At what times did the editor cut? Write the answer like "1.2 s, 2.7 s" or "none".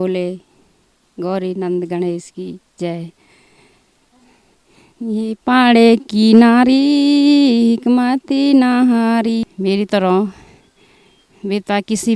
9.4 s